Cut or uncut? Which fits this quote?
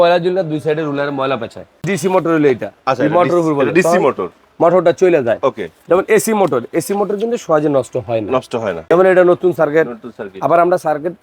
cut